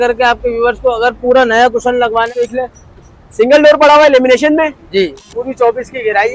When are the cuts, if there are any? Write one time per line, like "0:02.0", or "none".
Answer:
0:02.4
0:05.4